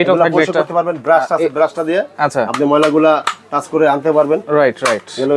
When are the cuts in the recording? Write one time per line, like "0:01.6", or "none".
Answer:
none